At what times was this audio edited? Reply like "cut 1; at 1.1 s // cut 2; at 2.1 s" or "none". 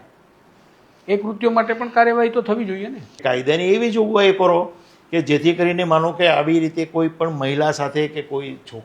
cut 1; at 3.2 s